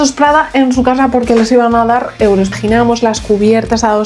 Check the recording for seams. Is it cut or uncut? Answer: cut